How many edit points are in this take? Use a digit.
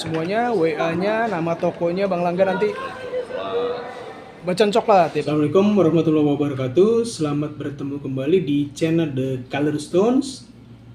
1